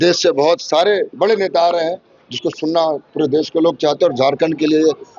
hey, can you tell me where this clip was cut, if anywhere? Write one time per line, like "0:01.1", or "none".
none